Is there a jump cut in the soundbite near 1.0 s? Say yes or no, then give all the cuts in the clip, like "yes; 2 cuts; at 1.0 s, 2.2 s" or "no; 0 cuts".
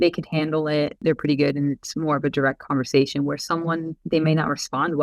yes; 2 cuts; at 1.0 s, 4.0 s